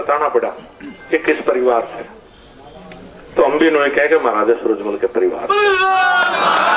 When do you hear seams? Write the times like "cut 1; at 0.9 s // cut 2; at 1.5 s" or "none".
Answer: none